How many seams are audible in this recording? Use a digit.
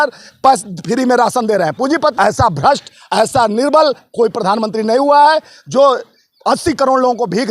1